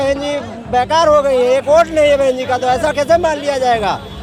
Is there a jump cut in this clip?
no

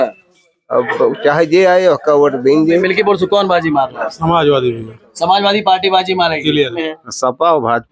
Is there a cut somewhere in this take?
yes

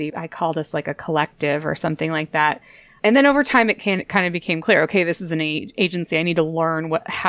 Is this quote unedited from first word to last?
yes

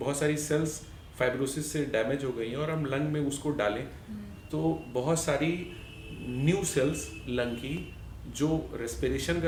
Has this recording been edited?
no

